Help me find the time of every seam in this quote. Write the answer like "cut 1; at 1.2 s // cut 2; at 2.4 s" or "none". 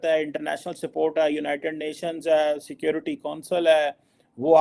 none